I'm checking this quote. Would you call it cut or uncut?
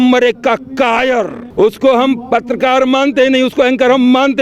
cut